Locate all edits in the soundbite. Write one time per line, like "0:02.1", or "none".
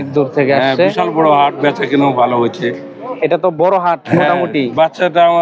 none